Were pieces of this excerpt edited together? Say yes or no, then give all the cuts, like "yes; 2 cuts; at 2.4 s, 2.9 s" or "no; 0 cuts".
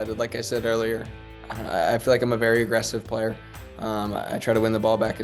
yes; 1 cut; at 1.1 s